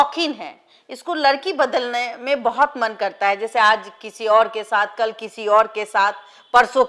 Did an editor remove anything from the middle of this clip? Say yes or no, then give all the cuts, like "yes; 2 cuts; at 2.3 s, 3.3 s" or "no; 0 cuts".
no; 0 cuts